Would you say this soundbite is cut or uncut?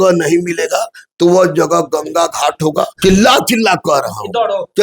cut